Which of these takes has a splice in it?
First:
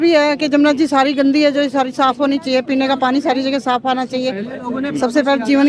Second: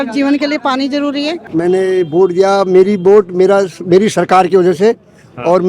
second; 1 cut; at 1.4 s

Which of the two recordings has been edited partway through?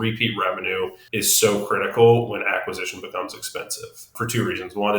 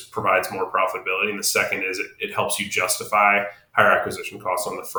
first; 2 cuts; at 1.0 s, 4.1 s

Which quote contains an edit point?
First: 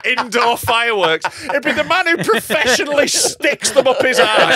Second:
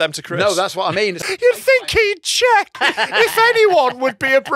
second; 2 cuts; at 1.2 s, 2.8 s

